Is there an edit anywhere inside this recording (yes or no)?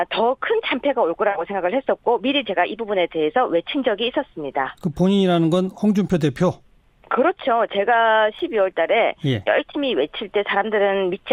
no